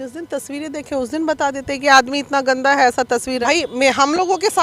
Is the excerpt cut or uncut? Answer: cut